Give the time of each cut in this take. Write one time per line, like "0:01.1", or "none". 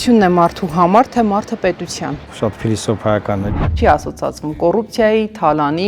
0:02.2
0:03.7